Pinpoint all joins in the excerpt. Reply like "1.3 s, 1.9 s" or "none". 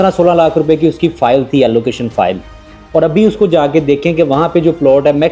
none